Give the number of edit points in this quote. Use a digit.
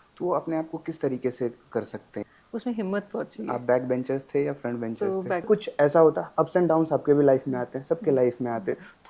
2